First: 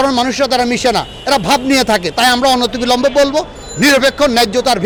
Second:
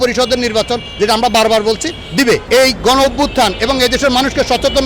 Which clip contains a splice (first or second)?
second